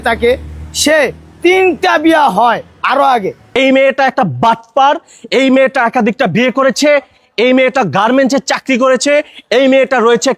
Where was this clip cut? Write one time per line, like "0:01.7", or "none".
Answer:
0:03.4